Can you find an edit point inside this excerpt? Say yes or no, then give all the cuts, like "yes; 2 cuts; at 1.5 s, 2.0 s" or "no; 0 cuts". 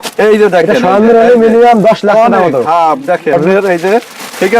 yes; 1 cut; at 3.3 s